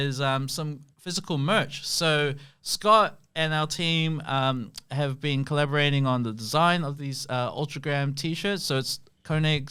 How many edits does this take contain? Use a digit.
0